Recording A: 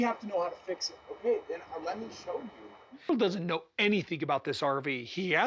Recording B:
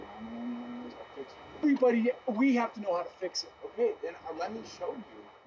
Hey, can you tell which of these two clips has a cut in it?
B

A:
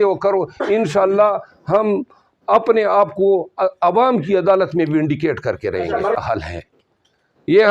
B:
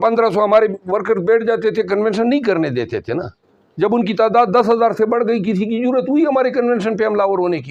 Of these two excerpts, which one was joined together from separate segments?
A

